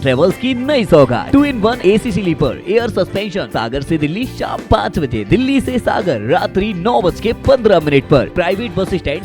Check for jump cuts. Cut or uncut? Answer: cut